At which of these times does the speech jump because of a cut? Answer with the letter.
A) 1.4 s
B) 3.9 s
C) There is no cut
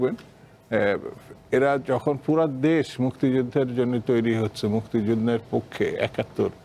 C